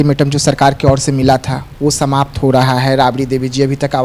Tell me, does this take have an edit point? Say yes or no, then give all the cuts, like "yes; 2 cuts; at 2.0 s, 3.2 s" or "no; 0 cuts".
no; 0 cuts